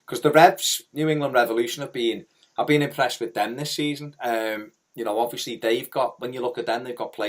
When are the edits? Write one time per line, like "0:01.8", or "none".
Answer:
0:05.0